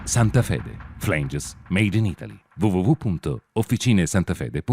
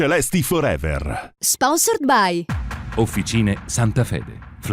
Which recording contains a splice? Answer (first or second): second